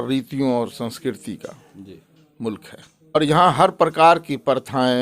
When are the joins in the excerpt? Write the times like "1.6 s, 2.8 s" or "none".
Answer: 3.2 s

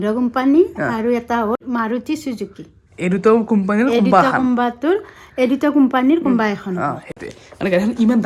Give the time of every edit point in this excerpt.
1.6 s

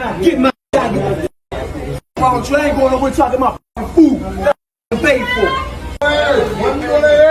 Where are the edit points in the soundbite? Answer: 6.0 s

